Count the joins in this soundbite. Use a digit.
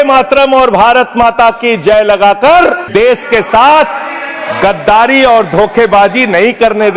1